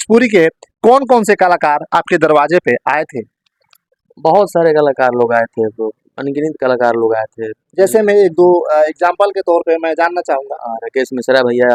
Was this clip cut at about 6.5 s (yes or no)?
no